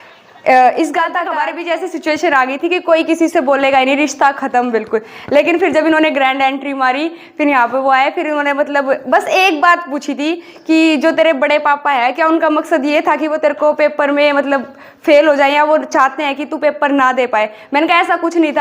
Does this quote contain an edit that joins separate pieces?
yes; 1 cut; at 1.2 s

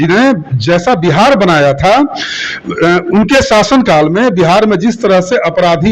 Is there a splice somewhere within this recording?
no; 0 cuts

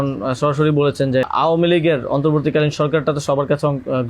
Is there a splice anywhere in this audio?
yes; 1 cut; at 1.3 s

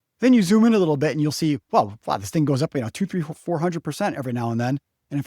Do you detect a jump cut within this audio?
no; 0 cuts

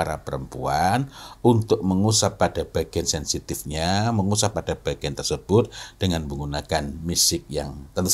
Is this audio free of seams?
yes; 0 cuts

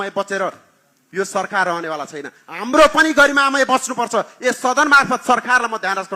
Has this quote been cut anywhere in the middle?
no; 0 cuts

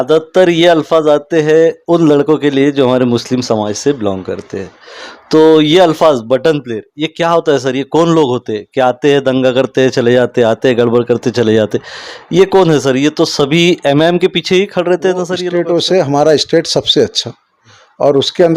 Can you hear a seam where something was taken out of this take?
yes; 1 cut; at 15.5 s

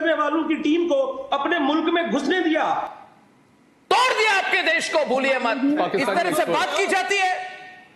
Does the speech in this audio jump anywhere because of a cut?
yes; 2 cuts; at 2.9 s, 5.8 s

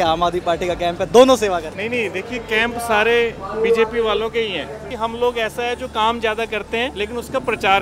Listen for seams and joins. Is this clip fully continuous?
no; 3 cuts; at 1.7 s, 4.9 s, 6.9 s

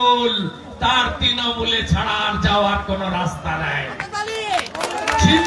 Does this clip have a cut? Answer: no; 0 cuts

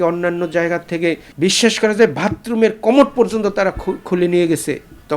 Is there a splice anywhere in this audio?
yes; 1 cut; at 1.3 s

